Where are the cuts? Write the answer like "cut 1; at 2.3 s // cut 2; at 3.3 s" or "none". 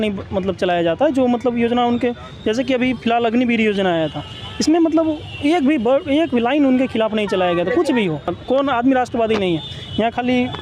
cut 1; at 8.3 s